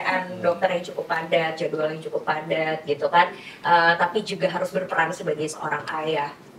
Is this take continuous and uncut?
yes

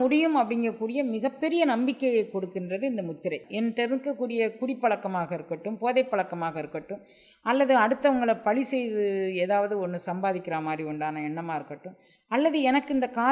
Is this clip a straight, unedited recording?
no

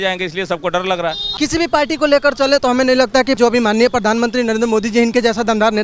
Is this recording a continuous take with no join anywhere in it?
no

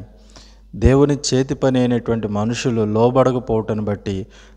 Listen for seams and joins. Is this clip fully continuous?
yes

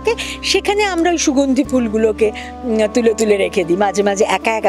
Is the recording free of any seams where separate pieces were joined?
yes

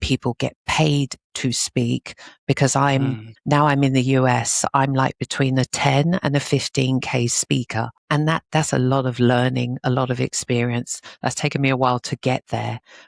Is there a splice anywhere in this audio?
yes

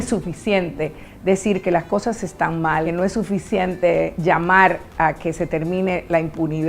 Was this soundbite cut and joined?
yes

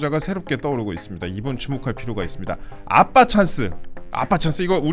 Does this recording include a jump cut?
no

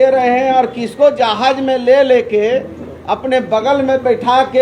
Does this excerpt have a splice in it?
no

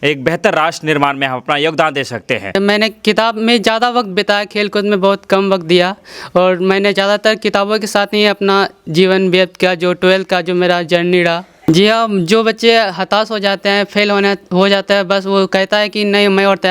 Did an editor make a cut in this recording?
yes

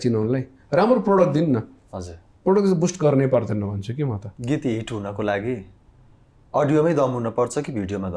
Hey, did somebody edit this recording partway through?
yes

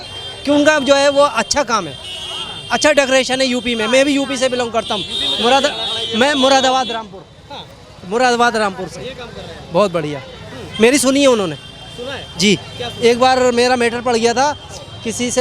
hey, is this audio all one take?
yes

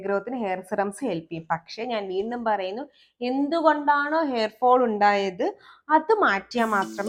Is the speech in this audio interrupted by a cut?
no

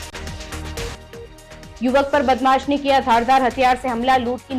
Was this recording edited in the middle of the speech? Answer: yes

